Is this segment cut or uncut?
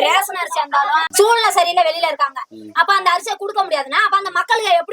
cut